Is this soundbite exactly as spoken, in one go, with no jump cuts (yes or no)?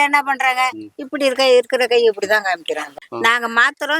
no